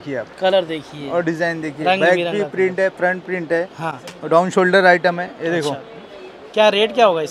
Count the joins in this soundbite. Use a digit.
0